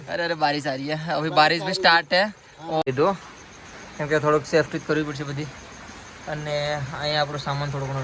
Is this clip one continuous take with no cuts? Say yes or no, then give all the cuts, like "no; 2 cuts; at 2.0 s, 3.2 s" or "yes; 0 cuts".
no; 1 cut; at 2.8 s